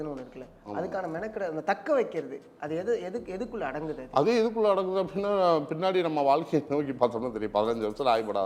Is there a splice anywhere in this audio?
no; 0 cuts

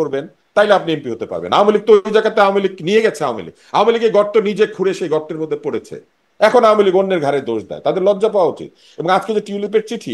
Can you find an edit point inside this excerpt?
no; 0 cuts

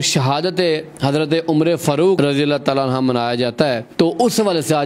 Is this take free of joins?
yes; 0 cuts

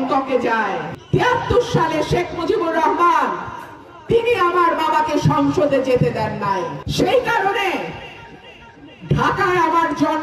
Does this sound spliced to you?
yes; 2 cuts; at 0.9 s, 6.8 s

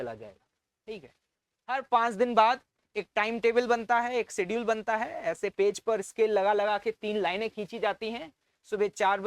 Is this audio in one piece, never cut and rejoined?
no; 1 cut; at 1.8 s

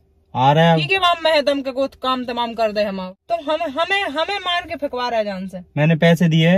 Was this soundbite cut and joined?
yes; 1 cut; at 3.1 s

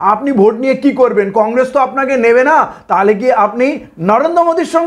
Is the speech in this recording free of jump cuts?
yes; 0 cuts

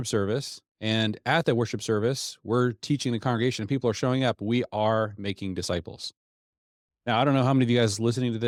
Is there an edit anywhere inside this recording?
no; 0 cuts

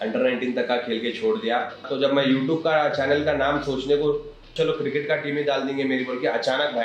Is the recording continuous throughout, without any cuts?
no; 2 cuts; at 1.9 s, 4.5 s

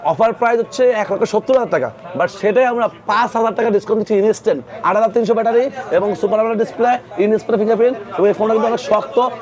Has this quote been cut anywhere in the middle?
yes; 1 cut; at 4.7 s

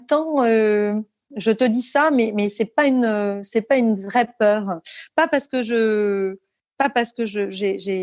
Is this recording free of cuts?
yes; 0 cuts

